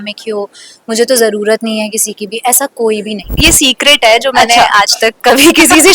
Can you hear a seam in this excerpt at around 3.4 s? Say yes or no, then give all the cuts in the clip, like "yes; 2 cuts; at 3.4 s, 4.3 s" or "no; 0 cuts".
yes; 1 cut; at 3.4 s